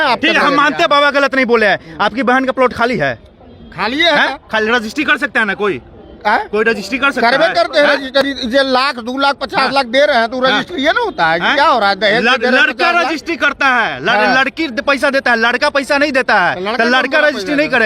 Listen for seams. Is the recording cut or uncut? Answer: uncut